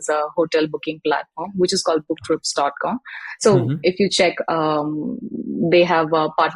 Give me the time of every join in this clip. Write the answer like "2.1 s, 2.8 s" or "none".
none